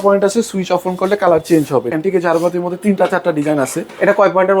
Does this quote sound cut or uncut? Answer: cut